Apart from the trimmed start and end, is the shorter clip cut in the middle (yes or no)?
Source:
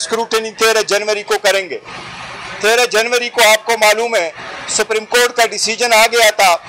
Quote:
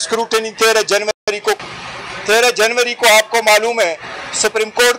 yes